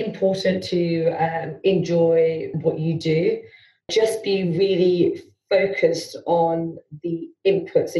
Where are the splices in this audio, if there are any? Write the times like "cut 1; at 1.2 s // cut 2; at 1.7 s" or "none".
cut 1; at 2.5 s // cut 2; at 3.9 s